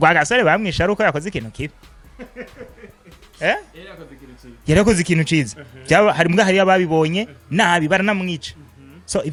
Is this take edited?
no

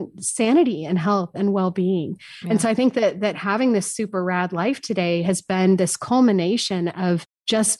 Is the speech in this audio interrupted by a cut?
yes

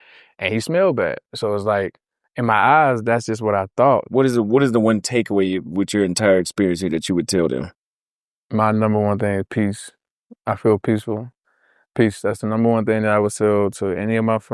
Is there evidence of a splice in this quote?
yes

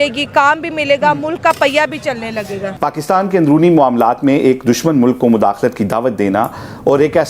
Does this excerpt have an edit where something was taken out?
yes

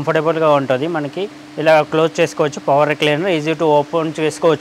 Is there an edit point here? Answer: no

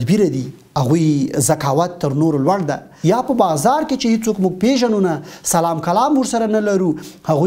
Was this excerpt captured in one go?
no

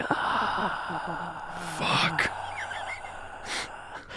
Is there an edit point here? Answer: no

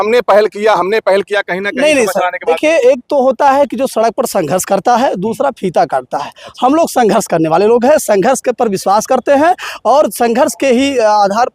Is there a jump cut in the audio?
no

